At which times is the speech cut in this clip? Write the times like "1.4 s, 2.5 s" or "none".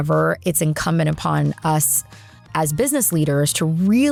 none